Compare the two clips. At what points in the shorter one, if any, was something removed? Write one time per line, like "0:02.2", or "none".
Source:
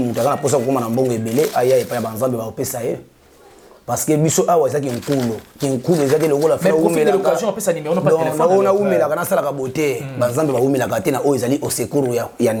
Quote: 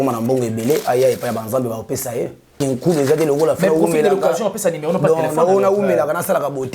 0:02.4